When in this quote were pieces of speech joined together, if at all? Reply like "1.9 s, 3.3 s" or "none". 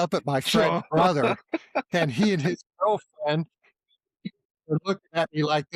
none